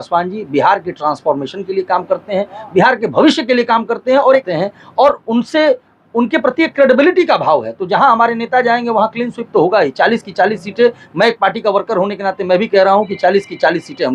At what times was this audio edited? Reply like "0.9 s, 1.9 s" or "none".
4.4 s